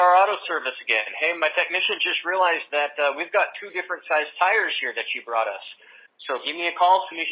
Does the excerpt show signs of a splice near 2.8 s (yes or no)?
no